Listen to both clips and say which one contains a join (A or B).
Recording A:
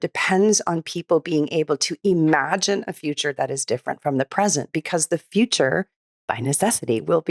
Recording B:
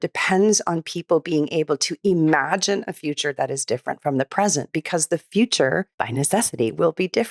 B